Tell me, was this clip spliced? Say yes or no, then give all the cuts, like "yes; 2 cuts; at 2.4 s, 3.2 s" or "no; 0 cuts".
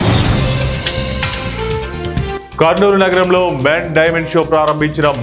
no; 0 cuts